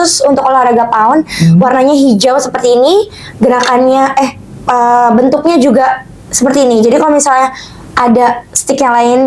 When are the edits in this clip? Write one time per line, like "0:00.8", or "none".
none